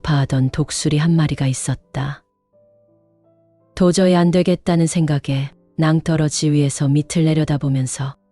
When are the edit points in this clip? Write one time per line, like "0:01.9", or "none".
0:02.2
0:03.6